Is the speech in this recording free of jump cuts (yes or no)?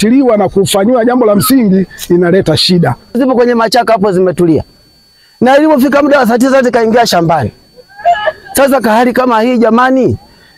no